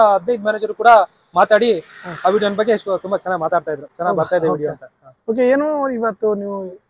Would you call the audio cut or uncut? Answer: uncut